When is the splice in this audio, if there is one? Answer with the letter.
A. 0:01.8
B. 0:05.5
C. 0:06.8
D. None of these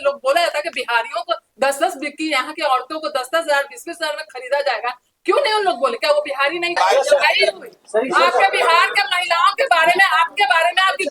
C